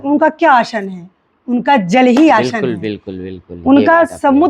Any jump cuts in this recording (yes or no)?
no